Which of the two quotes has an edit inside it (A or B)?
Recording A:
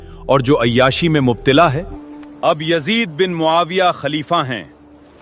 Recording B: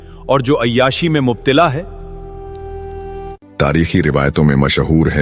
A